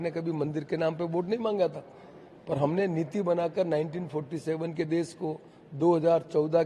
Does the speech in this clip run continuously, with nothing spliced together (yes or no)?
yes